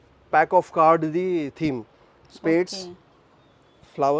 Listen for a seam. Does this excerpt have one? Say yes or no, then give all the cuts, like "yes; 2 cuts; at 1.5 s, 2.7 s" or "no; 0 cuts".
no; 0 cuts